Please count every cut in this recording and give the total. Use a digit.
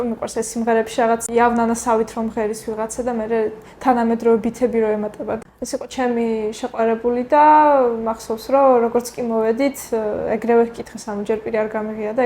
2